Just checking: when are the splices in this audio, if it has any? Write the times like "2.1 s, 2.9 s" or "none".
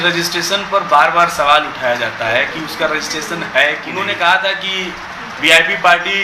3.9 s